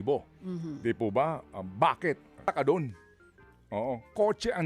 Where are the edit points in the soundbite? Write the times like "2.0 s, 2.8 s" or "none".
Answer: 2.4 s